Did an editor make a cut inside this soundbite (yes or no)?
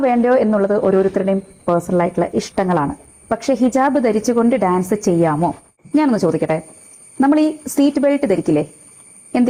no